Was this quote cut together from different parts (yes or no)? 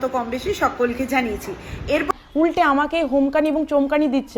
yes